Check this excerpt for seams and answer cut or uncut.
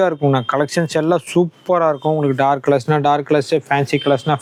uncut